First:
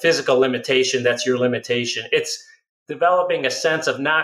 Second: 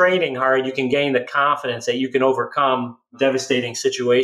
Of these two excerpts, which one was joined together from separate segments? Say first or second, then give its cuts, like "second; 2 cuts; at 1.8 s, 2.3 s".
second; 1 cut; at 3.1 s